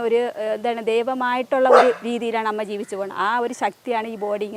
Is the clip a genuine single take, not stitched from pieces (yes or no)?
yes